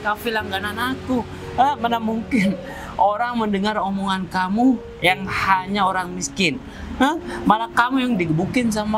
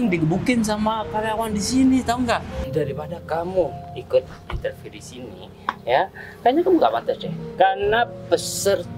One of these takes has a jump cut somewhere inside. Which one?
second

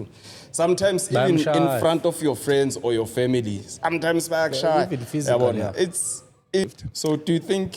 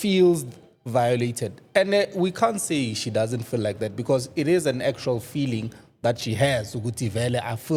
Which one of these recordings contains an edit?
first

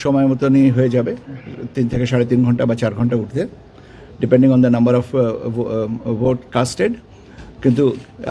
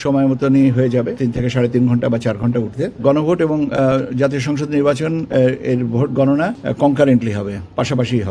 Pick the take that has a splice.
second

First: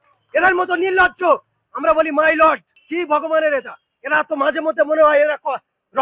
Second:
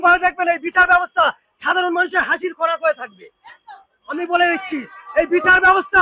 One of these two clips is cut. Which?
first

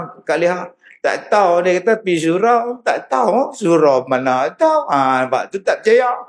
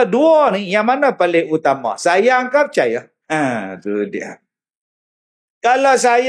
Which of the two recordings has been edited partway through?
second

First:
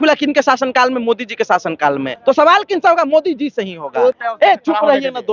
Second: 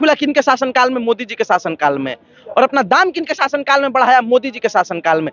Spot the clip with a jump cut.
first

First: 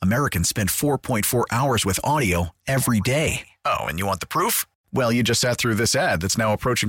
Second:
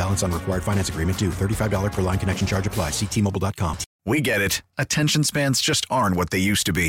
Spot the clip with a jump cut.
second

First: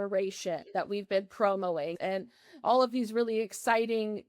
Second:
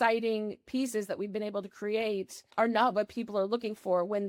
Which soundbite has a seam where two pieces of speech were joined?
first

